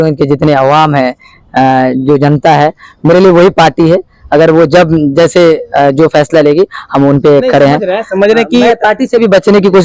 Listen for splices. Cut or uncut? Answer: uncut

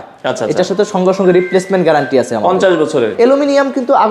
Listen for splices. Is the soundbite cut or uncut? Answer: cut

